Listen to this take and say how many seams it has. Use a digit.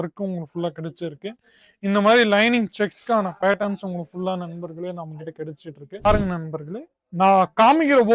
1